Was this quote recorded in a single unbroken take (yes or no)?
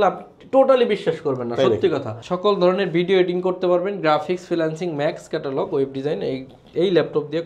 no